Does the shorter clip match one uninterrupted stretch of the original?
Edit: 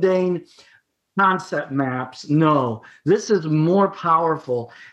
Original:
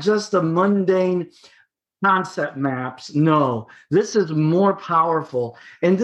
yes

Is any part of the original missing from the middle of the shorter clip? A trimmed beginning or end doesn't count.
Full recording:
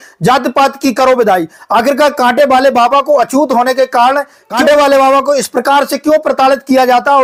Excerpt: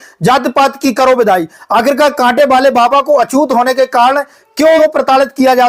yes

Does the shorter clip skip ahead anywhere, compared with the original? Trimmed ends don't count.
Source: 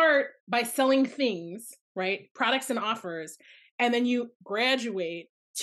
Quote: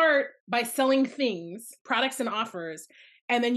yes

